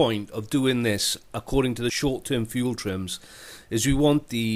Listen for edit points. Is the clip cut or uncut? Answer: cut